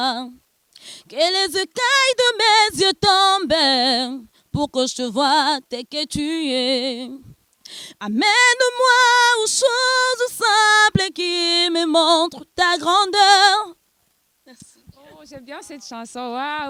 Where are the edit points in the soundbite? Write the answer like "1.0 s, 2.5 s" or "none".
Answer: none

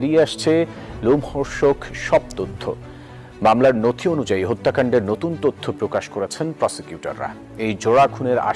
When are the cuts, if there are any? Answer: none

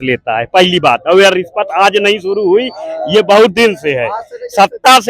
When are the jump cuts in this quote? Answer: none

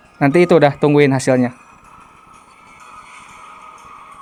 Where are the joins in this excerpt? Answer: none

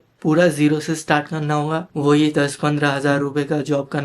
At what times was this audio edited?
none

